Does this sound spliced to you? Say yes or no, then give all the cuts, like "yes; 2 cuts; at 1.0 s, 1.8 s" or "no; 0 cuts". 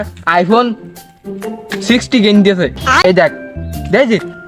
no; 0 cuts